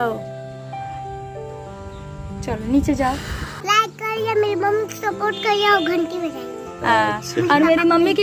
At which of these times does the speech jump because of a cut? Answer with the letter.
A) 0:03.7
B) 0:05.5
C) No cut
A